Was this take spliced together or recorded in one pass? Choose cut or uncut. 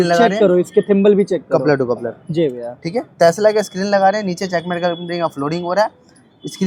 uncut